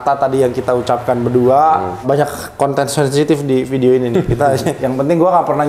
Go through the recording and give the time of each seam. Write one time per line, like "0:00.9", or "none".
0:02.0
0:04.8